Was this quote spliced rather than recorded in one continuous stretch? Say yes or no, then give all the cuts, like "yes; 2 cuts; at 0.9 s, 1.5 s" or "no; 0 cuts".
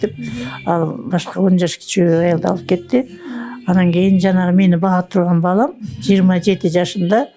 no; 0 cuts